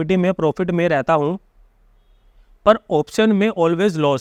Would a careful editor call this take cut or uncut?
uncut